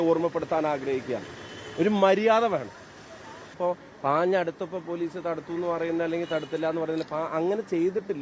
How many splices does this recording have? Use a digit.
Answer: 1